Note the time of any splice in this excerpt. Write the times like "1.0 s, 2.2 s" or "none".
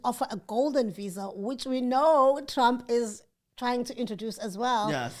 none